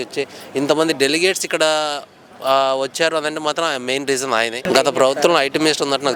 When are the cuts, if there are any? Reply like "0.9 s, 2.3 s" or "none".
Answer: 4.7 s